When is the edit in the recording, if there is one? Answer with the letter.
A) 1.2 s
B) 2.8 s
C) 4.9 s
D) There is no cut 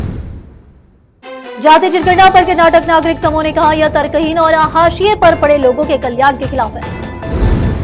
A